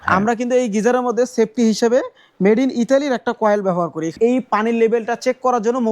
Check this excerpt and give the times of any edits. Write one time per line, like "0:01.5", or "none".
0:04.1